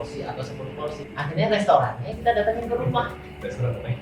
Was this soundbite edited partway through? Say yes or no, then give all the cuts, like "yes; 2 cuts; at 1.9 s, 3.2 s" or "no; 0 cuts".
yes; 1 cut; at 1.0 s